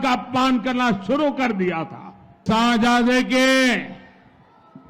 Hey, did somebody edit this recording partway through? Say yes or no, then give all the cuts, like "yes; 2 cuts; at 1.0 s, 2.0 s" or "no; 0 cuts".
yes; 1 cut; at 2.4 s